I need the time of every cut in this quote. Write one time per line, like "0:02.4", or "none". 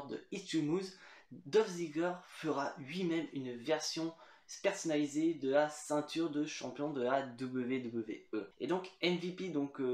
0:08.5